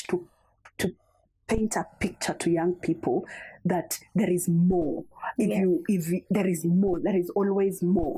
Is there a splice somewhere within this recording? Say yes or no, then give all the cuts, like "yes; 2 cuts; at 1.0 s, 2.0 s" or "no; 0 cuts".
no; 0 cuts